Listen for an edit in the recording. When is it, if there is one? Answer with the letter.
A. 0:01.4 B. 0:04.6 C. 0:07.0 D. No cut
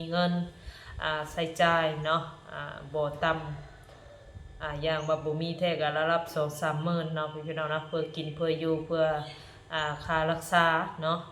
D